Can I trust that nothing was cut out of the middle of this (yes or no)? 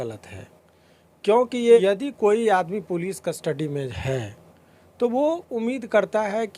no